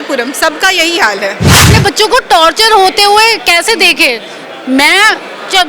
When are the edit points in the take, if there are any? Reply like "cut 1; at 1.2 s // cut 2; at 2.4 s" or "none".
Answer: cut 1; at 1.6 s